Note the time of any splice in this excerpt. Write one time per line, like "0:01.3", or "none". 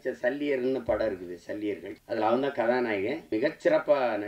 0:01.9
0:03.2